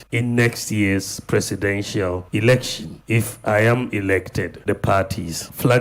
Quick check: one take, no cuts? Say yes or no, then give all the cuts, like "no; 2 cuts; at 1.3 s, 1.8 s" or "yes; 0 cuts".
no; 1 cut; at 4.5 s